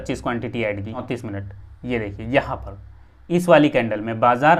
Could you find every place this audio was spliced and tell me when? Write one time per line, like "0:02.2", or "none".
0:01.0